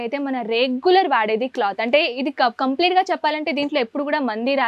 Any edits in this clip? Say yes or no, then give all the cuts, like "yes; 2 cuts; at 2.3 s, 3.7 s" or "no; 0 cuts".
no; 0 cuts